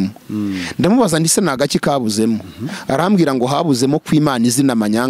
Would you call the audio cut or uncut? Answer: uncut